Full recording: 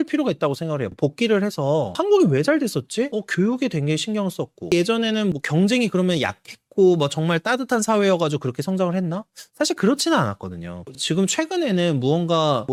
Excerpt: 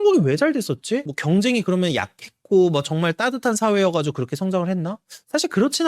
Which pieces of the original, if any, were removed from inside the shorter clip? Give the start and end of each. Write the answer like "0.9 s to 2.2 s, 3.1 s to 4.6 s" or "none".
3.2 s to 5.4 s